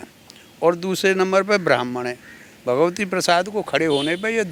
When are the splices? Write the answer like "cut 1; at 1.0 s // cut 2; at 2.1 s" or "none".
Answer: none